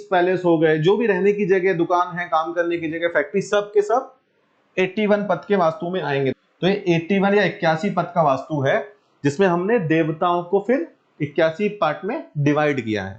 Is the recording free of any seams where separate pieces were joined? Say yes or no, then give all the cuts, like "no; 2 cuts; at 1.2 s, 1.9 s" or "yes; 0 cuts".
no; 1 cut; at 6.3 s